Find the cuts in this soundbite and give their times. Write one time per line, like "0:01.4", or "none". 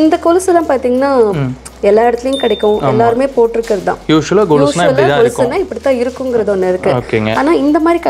none